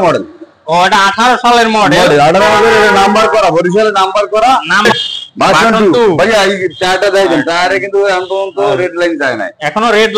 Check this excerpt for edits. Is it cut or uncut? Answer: cut